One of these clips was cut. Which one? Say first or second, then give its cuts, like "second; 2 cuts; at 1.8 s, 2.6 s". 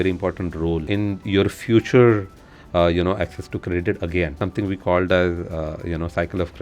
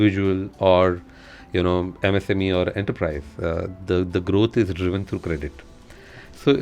first; 2 cuts; at 0.8 s, 4.3 s